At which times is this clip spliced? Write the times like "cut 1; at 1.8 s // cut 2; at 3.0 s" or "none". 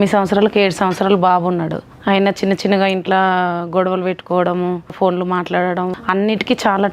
cut 1; at 1.9 s // cut 2; at 4.9 s // cut 3; at 6.0 s